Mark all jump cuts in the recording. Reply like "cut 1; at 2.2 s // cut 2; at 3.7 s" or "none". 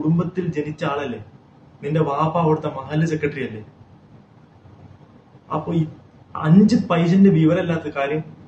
none